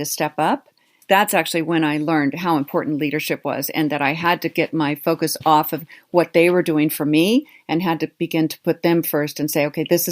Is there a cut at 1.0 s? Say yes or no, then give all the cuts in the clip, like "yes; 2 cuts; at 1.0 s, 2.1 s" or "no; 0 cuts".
yes; 1 cut; at 1.0 s